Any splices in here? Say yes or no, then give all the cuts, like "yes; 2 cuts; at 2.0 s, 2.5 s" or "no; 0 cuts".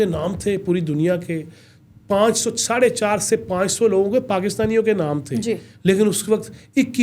no; 0 cuts